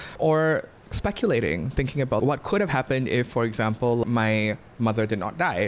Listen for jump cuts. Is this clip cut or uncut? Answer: cut